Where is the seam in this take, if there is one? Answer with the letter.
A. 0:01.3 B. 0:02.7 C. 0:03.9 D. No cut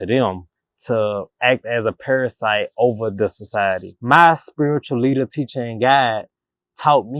C